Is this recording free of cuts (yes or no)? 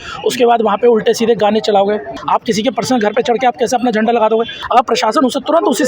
no